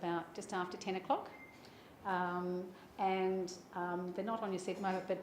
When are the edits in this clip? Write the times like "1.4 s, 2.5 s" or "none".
1.4 s